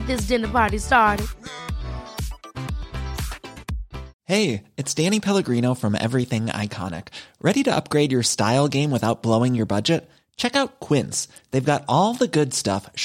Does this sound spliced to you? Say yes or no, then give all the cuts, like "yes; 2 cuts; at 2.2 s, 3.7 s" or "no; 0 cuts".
yes; 1 cut; at 4.1 s